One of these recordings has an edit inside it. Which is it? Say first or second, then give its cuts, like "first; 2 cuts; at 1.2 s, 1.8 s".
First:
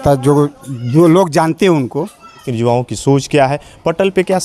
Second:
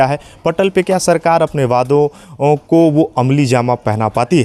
first; 1 cut; at 2.4 s